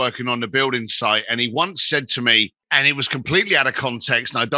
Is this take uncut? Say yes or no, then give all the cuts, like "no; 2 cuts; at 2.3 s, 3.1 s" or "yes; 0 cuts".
no; 1 cut; at 2.6 s